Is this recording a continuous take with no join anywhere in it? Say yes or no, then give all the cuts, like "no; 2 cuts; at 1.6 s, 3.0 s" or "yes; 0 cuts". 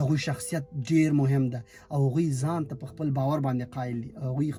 yes; 0 cuts